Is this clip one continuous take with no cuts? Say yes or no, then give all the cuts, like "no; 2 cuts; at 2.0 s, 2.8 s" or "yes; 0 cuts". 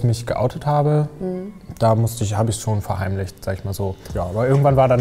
yes; 0 cuts